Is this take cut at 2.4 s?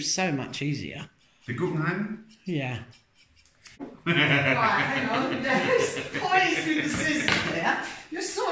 no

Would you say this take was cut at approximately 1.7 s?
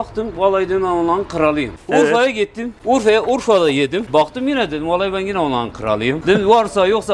yes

